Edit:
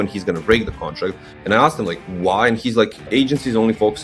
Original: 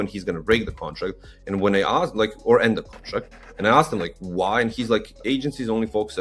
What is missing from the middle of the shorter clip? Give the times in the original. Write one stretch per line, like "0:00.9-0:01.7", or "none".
0:01.3-0:03.4

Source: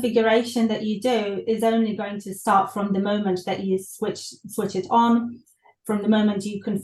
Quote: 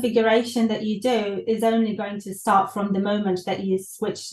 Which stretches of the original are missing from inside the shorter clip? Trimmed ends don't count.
none

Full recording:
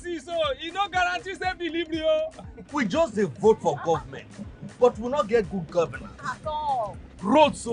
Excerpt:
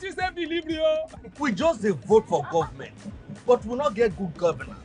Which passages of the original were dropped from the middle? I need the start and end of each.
0:02.4-0:02.5

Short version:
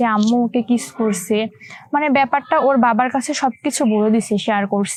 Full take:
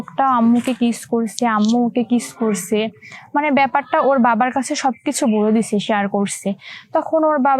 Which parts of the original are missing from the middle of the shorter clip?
none

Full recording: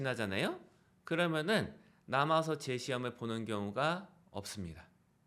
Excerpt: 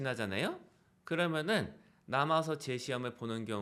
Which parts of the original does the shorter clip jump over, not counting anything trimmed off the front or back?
none

